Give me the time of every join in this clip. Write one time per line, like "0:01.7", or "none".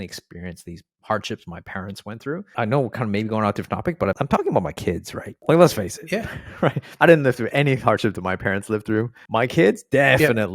0:02.5
0:04.2
0:06.8
0:09.2